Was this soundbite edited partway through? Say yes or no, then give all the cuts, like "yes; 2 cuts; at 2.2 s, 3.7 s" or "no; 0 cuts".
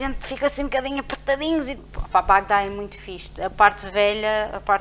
yes; 1 cut; at 1.8 s